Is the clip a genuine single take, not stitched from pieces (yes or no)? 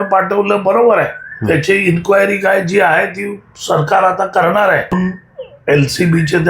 no